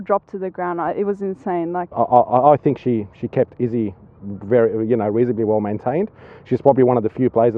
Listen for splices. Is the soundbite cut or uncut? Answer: cut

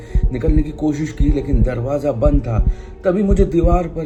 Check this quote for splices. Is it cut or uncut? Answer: uncut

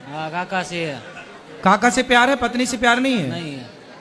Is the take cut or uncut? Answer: uncut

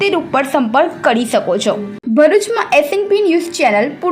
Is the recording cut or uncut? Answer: uncut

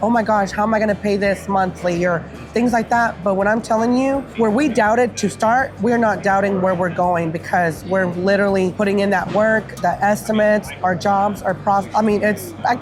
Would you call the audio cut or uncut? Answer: uncut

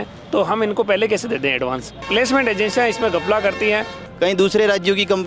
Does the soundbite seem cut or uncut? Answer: cut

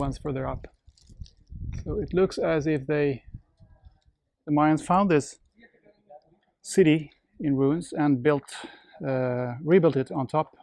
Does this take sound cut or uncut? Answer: cut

